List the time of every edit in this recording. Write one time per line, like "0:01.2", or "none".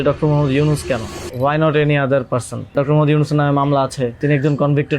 0:01.2
0:02.7
0:04.2

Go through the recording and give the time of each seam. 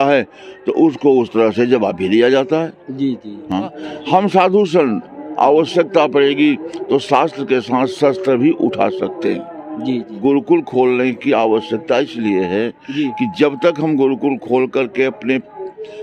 0:03.8
0:10.1

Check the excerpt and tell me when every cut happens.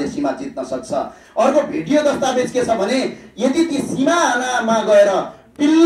none

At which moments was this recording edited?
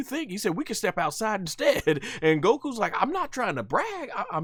none

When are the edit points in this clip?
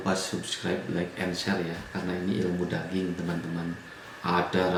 none

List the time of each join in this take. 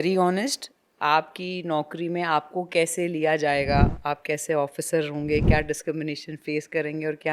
none

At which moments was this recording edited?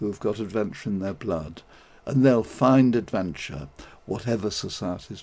none

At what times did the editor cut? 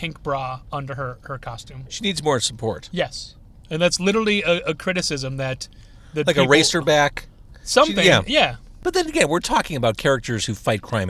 0:08.7

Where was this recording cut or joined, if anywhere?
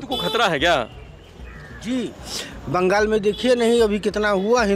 none

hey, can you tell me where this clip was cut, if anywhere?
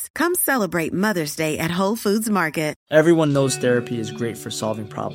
0:02.8

